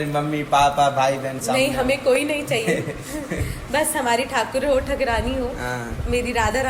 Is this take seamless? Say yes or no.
yes